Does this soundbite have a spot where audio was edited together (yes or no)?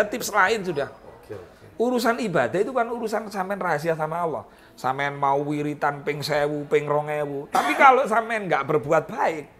no